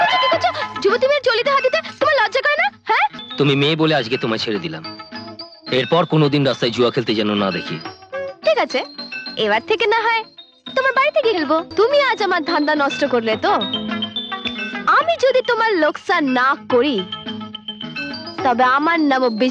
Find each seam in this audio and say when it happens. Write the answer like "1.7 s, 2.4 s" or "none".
3.2 s, 11.7 s